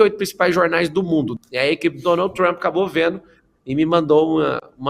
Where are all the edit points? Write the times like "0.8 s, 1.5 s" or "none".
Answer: 1.3 s